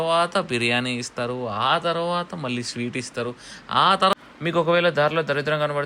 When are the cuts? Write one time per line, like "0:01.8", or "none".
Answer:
0:04.1

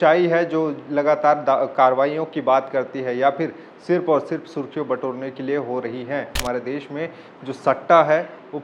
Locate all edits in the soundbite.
0:06.4

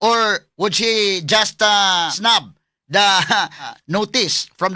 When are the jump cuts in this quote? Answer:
0:02.1
0:03.7

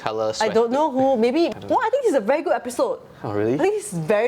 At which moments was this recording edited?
0:01.5

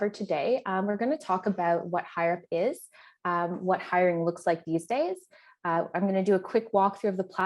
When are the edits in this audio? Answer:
none

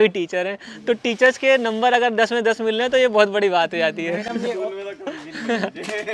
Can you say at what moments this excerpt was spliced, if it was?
none

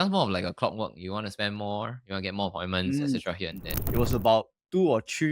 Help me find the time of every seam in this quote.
0:03.8

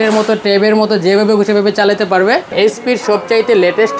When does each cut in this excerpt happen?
0:02.5

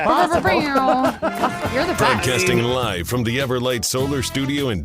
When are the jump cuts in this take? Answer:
0:02.3

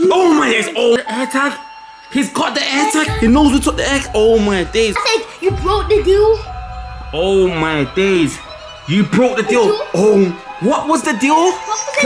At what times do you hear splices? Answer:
0:01.0
0:05.0

